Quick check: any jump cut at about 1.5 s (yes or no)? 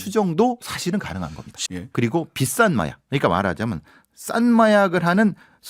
yes